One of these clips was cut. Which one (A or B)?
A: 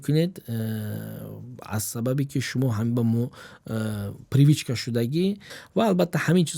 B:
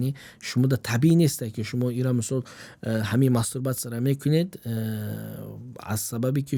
A